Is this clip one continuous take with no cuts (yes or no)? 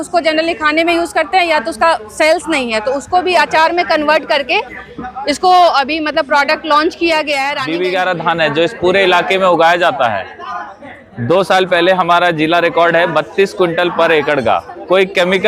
no